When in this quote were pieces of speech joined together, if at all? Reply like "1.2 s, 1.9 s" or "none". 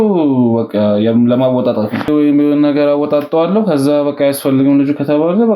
2.1 s